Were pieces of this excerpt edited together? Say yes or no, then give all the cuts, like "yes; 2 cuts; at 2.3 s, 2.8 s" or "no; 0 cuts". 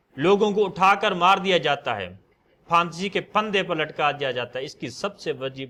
no; 0 cuts